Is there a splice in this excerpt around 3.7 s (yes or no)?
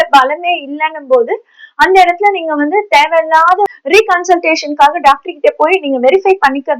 yes